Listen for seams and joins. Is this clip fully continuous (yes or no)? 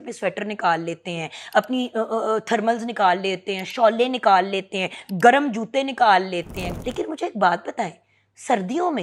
no